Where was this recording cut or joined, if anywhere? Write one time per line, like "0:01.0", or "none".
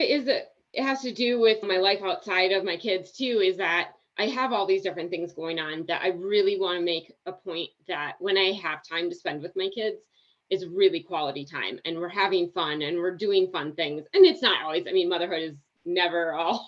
0:01.6